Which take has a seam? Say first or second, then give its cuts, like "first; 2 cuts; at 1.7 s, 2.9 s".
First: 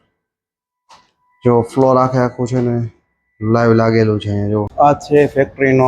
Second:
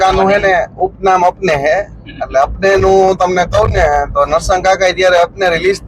first; 1 cut; at 4.7 s